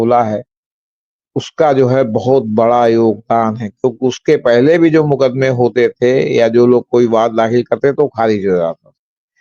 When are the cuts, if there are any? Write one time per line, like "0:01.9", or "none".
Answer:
none

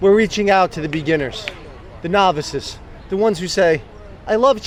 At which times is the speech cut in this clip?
none

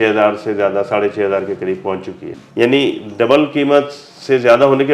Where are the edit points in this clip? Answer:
0:02.4

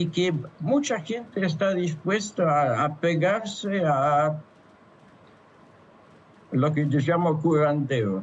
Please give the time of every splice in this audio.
none

